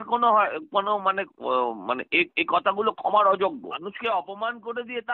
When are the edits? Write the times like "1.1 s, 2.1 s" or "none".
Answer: 3.7 s